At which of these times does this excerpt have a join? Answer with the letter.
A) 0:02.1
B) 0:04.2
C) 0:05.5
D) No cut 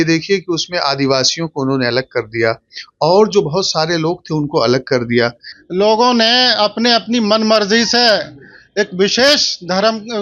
C